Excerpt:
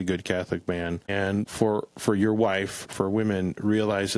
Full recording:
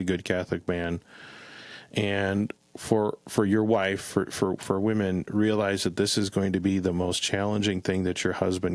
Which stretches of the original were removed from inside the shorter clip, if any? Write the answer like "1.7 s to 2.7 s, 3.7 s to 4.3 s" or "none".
1.4 s to 2.7 s, 4.1 s to 4.5 s